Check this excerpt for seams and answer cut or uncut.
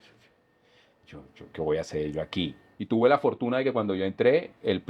cut